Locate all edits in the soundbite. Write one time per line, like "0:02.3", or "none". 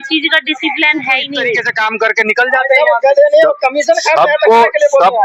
0:01.7